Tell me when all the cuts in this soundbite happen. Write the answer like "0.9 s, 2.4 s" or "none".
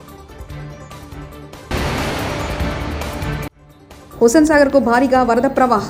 none